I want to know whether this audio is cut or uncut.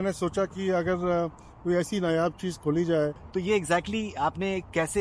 cut